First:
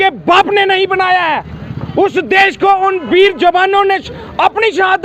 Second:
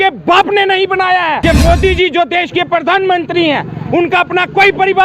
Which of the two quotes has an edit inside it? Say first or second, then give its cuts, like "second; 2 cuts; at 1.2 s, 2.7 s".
second; 1 cut; at 1.4 s